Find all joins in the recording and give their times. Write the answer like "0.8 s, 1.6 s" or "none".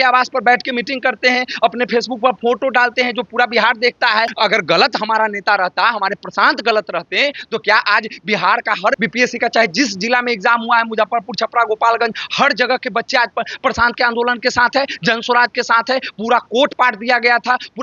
4.3 s, 9.0 s